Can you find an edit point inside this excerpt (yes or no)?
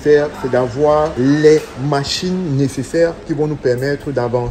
yes